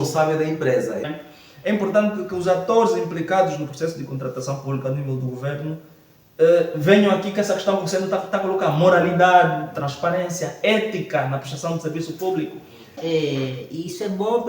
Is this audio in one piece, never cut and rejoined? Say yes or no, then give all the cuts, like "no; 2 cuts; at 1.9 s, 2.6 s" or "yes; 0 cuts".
no; 2 cuts; at 1.1 s, 13.0 s